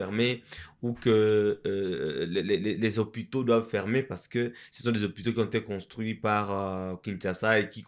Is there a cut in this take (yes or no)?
no